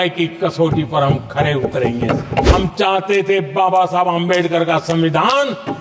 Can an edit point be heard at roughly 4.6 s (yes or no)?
no